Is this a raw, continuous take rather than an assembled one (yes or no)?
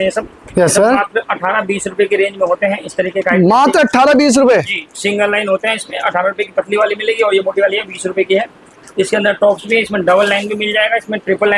yes